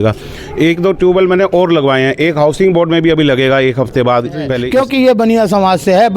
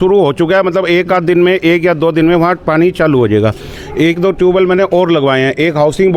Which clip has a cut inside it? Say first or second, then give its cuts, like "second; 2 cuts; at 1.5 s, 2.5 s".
first; 1 cut; at 4.6 s